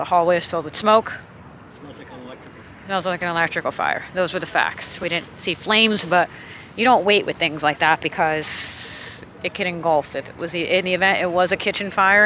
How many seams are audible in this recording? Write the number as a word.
zero